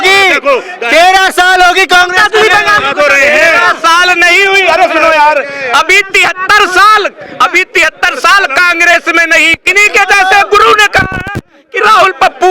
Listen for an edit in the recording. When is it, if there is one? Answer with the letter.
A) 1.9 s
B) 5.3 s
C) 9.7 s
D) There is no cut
C